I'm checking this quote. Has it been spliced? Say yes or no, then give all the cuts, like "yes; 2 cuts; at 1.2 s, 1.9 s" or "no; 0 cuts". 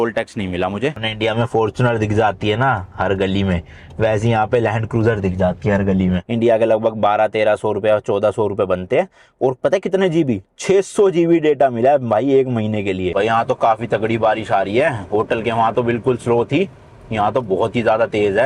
yes; 3 cuts; at 1.1 s, 6.3 s, 13.1 s